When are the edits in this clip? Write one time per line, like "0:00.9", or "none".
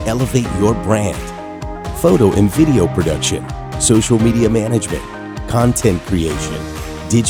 none